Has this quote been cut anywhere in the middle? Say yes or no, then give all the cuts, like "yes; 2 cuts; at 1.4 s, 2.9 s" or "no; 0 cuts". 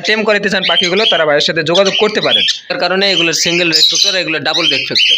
yes; 1 cut; at 2.7 s